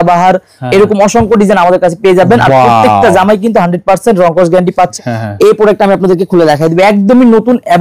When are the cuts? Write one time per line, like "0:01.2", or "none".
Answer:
0:04.9